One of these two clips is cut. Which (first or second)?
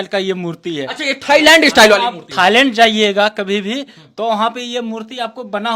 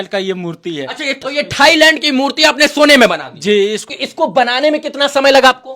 second